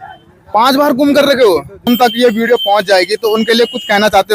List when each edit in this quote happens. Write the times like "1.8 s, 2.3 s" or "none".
1.8 s